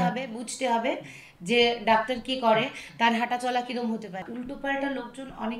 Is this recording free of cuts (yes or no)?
no